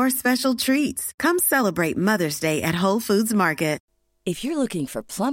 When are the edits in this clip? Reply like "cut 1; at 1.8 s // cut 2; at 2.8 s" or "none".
none